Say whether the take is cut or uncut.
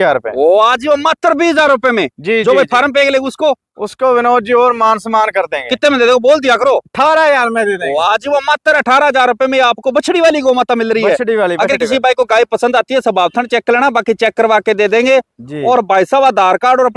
uncut